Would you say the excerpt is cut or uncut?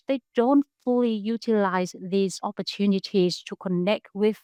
uncut